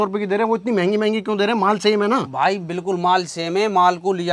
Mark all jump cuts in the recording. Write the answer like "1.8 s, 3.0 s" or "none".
none